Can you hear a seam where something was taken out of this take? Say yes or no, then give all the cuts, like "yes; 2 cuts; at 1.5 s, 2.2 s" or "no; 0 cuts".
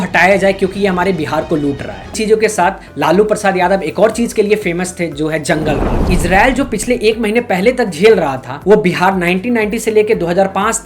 yes; 1 cut; at 2.1 s